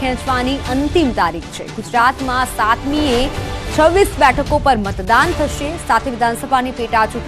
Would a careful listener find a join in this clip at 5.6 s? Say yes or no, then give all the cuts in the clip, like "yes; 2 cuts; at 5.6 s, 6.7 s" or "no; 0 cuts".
yes; 1 cut; at 5.6 s